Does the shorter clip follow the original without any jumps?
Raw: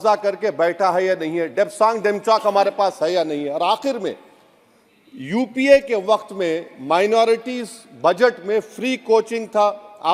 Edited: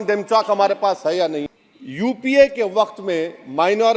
no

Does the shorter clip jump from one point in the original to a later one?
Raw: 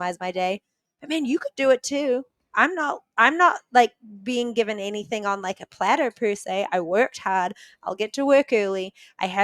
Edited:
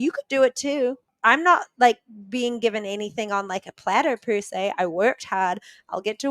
yes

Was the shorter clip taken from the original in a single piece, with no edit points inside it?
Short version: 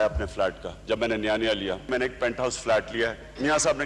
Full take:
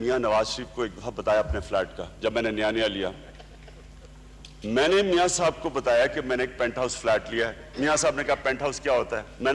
no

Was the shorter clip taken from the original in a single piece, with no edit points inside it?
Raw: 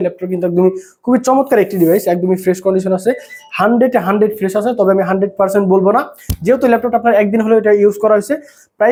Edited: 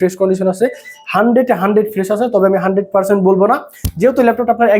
yes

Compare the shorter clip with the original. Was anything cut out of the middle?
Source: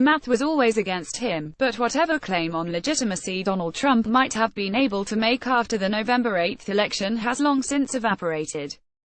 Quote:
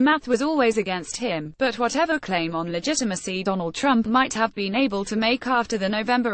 no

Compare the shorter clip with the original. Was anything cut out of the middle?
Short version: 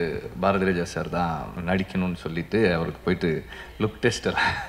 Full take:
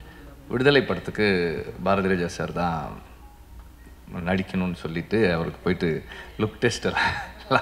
yes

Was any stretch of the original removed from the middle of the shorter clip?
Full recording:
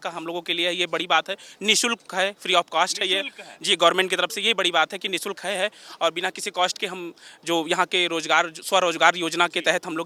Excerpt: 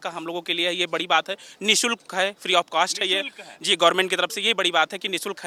no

